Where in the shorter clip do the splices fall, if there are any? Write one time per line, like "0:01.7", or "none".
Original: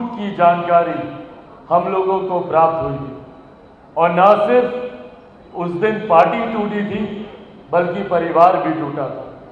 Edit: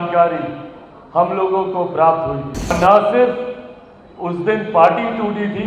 0:02.7